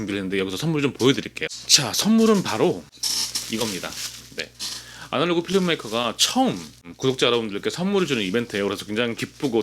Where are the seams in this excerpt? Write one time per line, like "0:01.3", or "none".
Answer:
0:01.5